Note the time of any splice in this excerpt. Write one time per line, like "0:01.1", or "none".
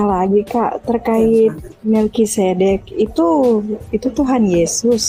none

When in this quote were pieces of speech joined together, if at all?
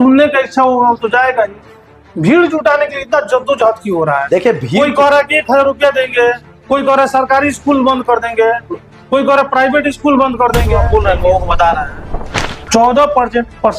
0:10.8

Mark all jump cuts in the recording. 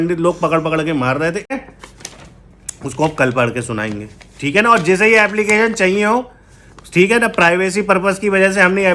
0:01.5

